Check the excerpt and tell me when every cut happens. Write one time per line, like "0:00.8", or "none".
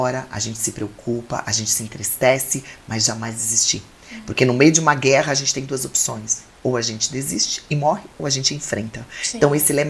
none